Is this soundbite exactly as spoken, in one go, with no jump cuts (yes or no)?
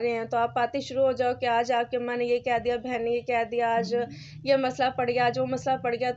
yes